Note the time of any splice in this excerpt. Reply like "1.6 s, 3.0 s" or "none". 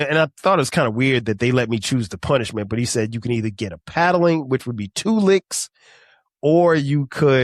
none